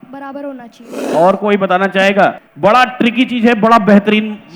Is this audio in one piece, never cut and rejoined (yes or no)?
no